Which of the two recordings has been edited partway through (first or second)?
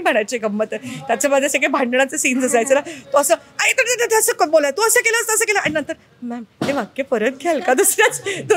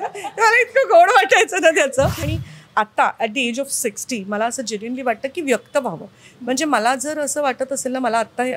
second